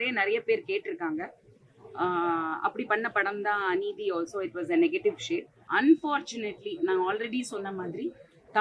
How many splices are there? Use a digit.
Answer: 1